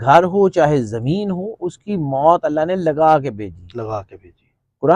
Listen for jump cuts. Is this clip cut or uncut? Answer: uncut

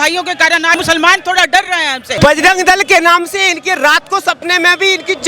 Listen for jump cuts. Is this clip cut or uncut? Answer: cut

